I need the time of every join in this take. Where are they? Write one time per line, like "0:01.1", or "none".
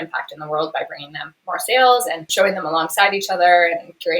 0:02.2